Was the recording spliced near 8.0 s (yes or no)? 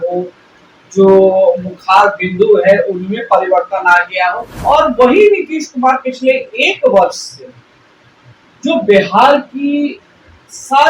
no